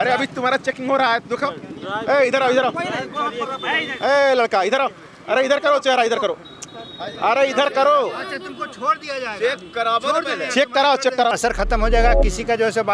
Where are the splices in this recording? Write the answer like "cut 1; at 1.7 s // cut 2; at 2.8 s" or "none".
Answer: cut 1; at 11.3 s